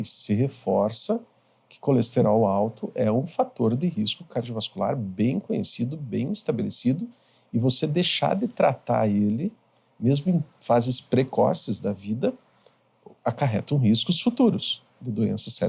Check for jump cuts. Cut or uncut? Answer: uncut